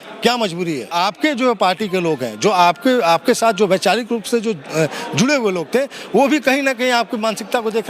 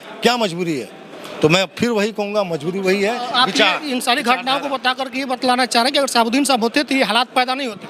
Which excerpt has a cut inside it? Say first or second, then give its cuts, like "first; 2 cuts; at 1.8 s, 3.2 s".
first; 1 cut; at 0.9 s